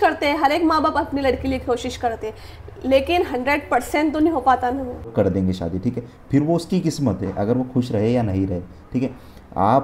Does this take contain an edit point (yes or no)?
yes